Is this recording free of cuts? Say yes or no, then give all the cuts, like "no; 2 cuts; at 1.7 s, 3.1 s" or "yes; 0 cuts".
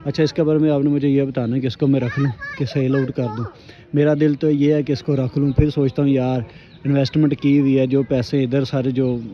yes; 0 cuts